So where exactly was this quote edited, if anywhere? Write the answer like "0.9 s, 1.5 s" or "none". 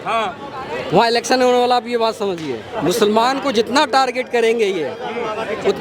2.7 s